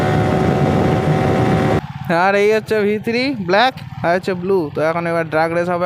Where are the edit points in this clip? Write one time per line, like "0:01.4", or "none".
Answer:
0:01.8

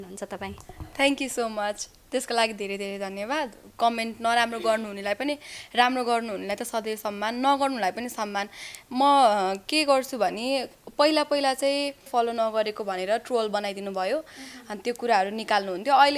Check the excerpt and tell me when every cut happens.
0:12.1

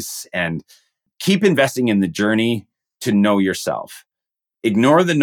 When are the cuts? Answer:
0:01.1

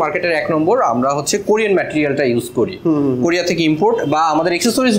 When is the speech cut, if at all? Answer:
none

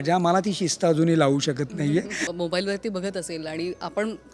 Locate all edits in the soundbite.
0:02.3

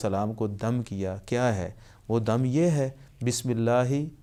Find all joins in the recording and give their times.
none

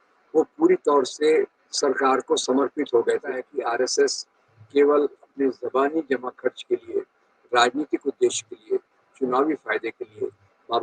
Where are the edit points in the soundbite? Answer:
0:03.5

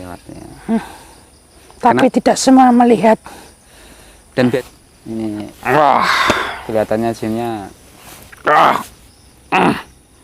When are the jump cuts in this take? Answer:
0:04.5

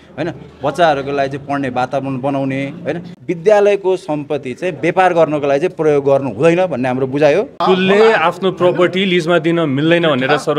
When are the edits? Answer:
0:03.1
0:07.5

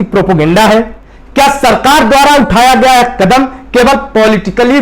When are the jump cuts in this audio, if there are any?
none

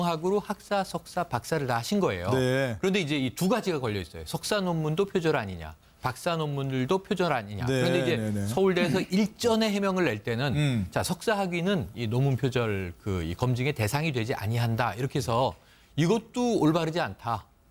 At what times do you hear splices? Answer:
none

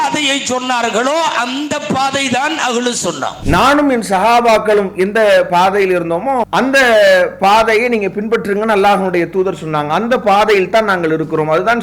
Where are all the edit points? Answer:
0:03.4
0:06.5

